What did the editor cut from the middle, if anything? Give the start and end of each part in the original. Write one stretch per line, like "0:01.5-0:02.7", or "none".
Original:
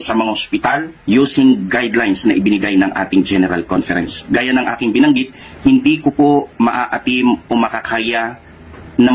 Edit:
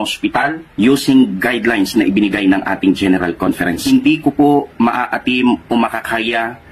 0:04.1-0:05.6